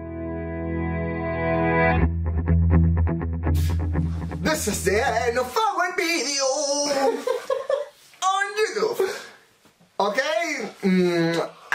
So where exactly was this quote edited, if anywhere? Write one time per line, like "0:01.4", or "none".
0:04.3